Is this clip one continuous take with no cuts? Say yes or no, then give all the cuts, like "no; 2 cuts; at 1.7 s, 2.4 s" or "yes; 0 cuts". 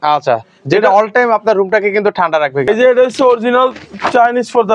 no; 1 cut; at 2.6 s